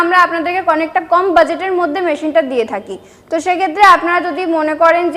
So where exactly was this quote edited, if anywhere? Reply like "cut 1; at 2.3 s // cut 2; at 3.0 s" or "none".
none